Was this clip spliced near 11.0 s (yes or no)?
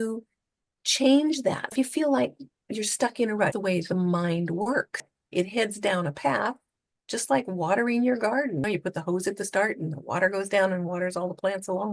no